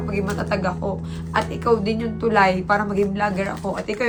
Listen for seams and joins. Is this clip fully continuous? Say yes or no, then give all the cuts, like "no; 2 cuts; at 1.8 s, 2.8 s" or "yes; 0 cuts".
yes; 0 cuts